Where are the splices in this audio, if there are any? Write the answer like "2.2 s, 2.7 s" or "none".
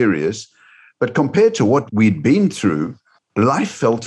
1.9 s, 3.2 s